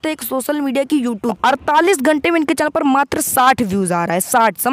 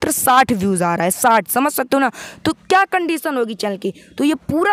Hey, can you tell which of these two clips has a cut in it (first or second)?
first